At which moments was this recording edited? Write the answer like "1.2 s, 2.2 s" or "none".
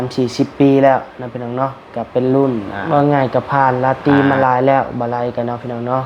2.7 s

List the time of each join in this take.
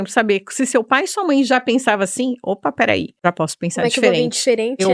3.1 s

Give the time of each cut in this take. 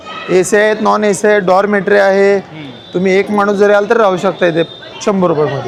none

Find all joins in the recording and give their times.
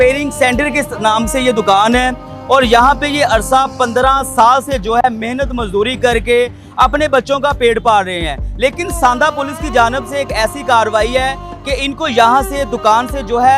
none

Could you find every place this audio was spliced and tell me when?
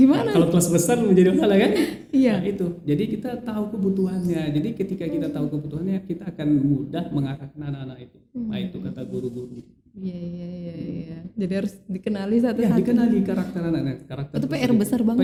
none

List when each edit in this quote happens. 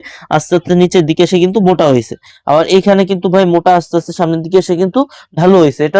none

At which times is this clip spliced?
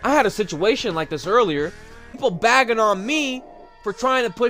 2.2 s

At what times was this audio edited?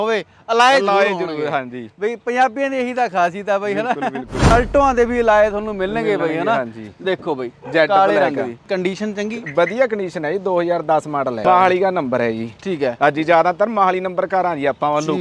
4.5 s, 8.7 s, 11.4 s

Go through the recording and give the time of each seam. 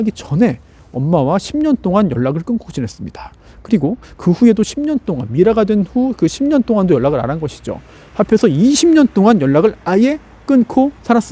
none

